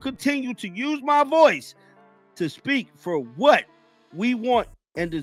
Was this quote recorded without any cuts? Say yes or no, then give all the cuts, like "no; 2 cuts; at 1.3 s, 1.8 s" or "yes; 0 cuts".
yes; 0 cuts